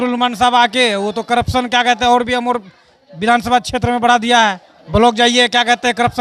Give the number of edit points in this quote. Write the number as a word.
one